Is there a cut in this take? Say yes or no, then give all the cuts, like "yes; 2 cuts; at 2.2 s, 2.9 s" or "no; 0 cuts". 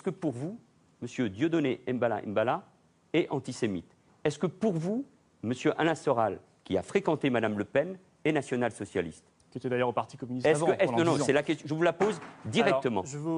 no; 0 cuts